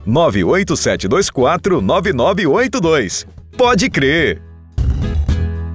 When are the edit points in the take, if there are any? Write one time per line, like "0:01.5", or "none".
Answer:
0:04.8